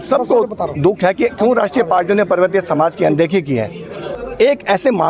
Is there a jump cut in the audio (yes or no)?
yes